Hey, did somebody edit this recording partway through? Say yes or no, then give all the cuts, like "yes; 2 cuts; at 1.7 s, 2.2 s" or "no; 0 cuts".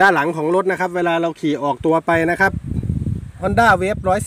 yes; 1 cut; at 3.3 s